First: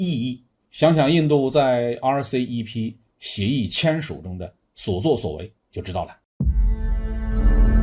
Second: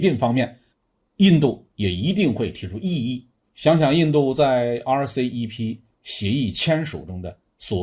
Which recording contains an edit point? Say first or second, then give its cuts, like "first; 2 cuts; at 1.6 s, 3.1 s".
first; 1 cut; at 6.2 s